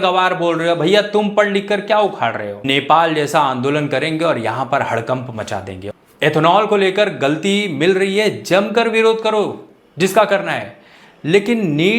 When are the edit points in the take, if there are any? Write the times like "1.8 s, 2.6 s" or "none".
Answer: 2.6 s, 5.8 s